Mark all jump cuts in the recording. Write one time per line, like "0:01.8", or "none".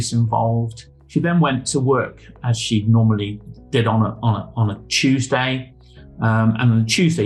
none